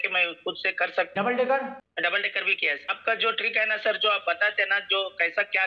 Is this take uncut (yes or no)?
no